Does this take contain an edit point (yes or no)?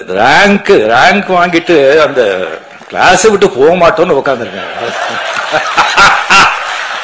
no